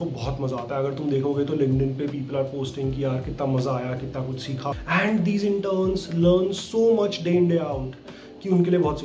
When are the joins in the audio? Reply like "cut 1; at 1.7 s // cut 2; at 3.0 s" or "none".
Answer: cut 1; at 4.8 s

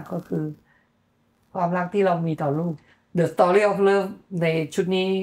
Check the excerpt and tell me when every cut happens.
cut 1; at 2.7 s

